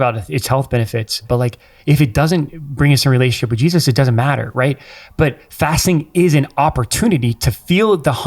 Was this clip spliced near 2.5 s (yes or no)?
no